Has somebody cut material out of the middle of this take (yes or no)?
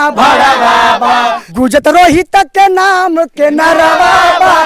yes